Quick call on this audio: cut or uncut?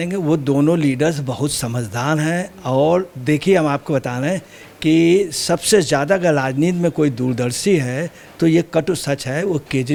uncut